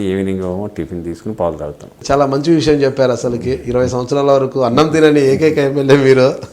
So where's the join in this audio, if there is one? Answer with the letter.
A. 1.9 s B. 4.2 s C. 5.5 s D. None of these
A